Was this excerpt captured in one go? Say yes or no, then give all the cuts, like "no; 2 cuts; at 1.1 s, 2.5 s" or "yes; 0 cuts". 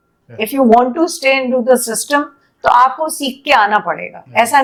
yes; 0 cuts